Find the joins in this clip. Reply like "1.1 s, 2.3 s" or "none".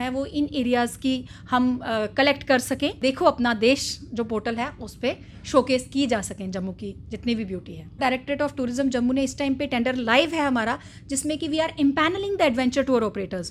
3.0 s, 8.0 s

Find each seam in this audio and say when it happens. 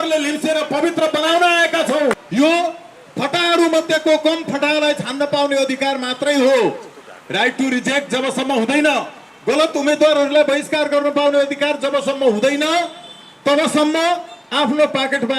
2.2 s

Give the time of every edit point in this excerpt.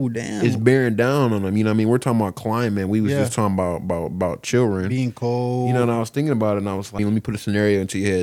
7.0 s

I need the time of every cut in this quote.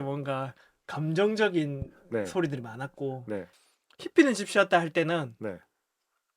3.5 s

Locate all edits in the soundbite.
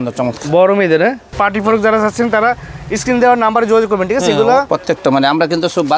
1.3 s, 4.7 s

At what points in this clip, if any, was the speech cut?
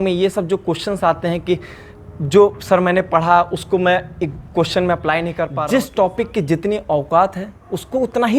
5.5 s

